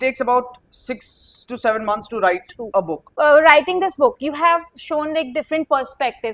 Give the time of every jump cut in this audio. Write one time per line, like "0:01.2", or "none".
0:03.0